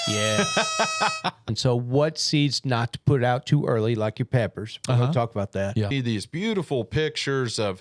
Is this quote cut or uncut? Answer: cut